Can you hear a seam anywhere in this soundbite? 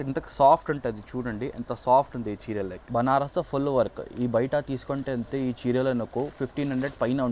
yes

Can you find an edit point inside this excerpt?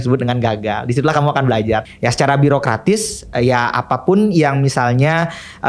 yes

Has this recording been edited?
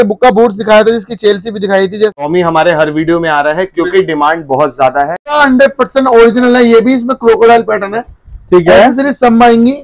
yes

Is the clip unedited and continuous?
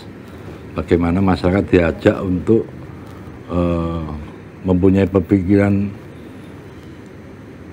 yes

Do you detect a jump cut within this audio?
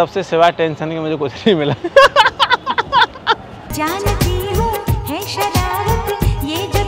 no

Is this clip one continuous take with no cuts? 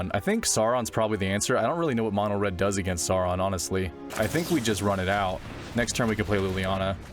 no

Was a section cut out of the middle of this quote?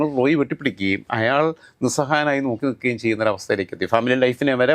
no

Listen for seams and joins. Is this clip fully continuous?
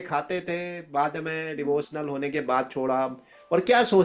yes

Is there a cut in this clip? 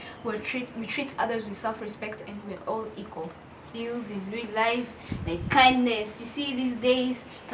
yes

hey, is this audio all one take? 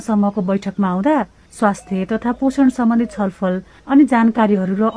no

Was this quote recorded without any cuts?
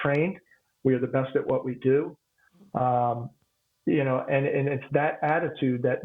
yes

